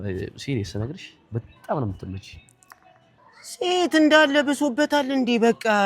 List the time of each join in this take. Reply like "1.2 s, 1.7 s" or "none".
3.2 s